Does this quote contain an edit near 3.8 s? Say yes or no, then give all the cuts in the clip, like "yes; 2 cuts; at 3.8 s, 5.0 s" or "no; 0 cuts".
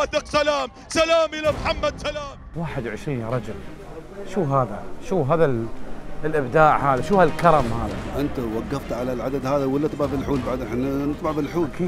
no; 1 cut; at 2.4 s